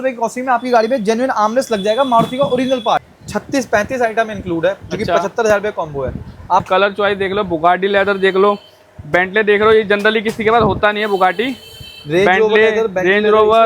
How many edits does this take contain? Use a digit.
2